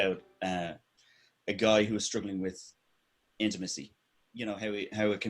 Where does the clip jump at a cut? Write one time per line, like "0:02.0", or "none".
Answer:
0:04.0